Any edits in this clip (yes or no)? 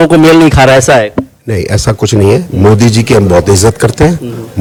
no